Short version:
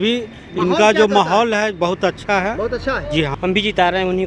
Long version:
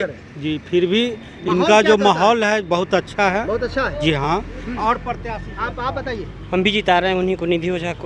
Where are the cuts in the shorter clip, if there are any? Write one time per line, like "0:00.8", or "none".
0:03.3